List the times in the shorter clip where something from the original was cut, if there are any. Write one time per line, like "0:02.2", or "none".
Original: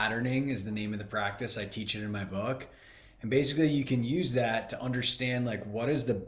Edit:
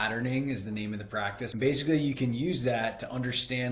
0:01.4